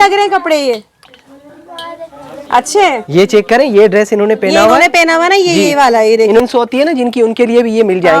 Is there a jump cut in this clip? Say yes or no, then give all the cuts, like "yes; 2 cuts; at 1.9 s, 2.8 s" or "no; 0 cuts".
yes; 1 cut; at 6.4 s